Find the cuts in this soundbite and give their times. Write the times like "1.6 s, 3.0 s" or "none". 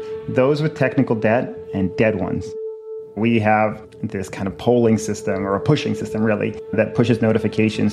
2.6 s